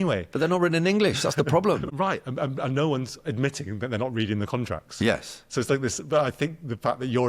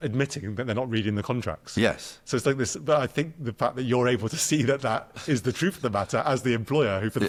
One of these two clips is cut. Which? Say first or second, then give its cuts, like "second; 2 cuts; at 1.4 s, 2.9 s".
first; 1 cut; at 1.9 s